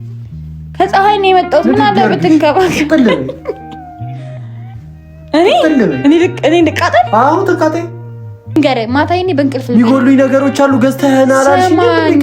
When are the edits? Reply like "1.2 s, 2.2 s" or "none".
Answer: 3.6 s, 5.1 s, 8.6 s